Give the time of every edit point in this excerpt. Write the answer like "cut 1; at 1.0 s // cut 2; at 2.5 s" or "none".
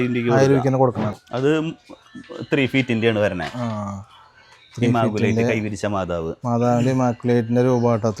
cut 1; at 1.1 s